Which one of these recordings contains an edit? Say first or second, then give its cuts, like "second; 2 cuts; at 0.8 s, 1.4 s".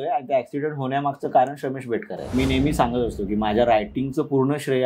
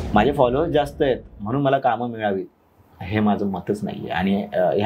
first; 1 cut; at 2.3 s